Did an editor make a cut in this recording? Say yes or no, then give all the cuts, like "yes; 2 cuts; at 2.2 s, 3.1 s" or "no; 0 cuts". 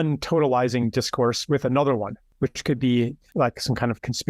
yes; 2 cuts; at 2.2 s, 3.2 s